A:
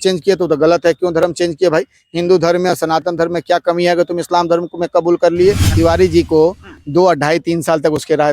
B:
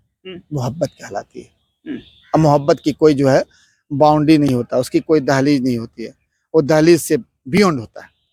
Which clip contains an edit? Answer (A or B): A